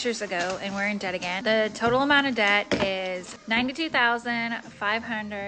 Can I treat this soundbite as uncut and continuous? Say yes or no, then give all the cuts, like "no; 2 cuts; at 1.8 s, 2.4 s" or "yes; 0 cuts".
no; 2 cuts; at 1.4 s, 3.3 s